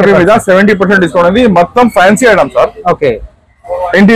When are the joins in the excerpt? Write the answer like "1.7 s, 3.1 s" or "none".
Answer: none